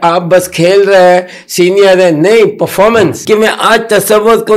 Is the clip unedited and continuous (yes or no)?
no